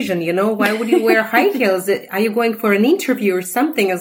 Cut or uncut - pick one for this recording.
uncut